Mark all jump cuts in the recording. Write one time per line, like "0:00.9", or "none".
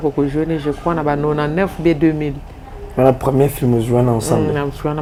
none